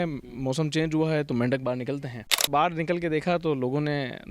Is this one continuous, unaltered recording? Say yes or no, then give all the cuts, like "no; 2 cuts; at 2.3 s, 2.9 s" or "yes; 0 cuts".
no; 1 cut; at 2.4 s